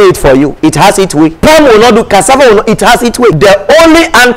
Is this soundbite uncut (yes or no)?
no